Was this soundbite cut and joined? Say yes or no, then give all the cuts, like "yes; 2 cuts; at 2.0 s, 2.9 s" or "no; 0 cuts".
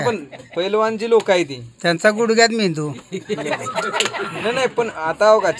no; 0 cuts